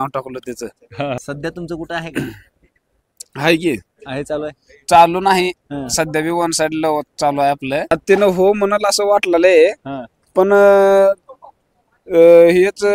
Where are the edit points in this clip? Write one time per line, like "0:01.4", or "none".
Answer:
0:01.2
0:07.9